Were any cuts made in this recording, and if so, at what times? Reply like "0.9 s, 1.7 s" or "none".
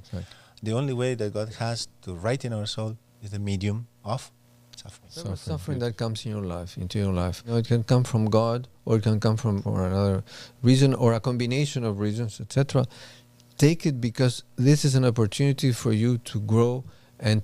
5.5 s, 7.5 s, 9.6 s